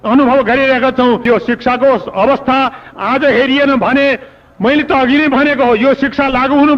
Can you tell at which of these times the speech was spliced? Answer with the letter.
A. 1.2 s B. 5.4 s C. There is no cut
A